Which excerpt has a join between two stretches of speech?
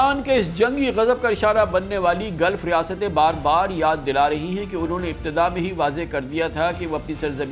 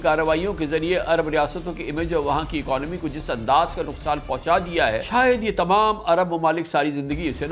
second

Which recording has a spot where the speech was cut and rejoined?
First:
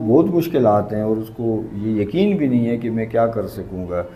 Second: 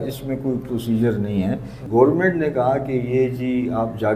second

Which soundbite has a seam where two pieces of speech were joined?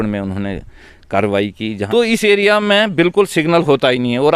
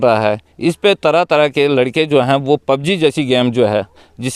first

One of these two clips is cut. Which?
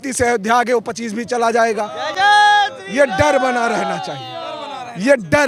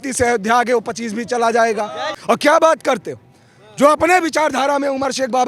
second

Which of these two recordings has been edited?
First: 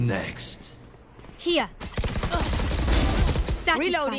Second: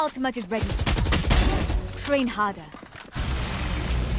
second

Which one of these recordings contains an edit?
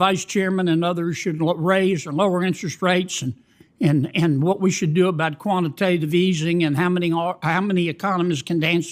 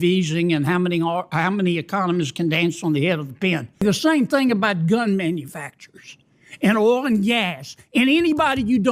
second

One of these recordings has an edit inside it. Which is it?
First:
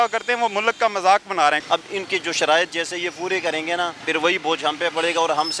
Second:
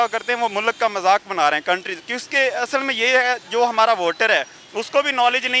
first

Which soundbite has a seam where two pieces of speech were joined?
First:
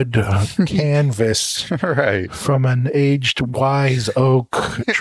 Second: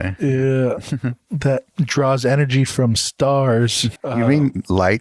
second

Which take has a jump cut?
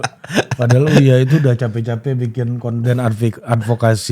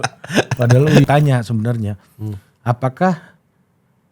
second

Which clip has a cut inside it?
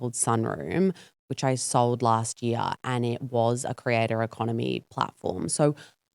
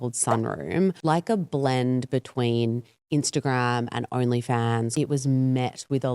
second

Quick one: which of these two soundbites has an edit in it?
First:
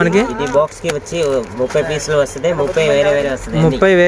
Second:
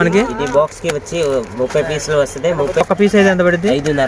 second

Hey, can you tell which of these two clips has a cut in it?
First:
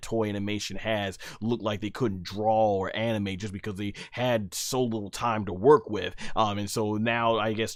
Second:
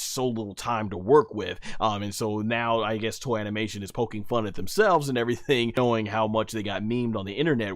second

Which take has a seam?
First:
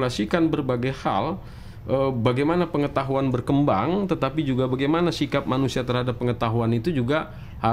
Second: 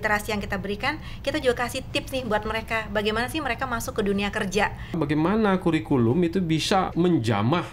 second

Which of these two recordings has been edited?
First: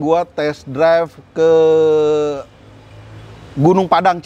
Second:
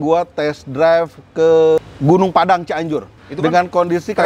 second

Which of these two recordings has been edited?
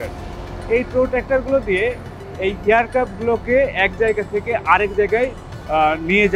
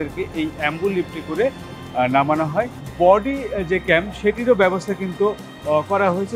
second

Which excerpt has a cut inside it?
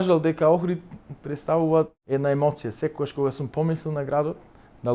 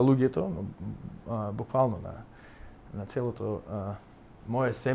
first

